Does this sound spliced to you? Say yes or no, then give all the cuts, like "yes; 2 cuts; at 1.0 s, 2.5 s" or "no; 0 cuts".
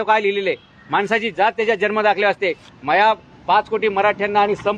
no; 0 cuts